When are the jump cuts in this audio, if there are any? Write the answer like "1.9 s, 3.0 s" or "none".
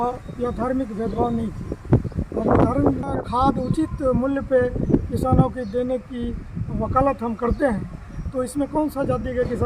3.1 s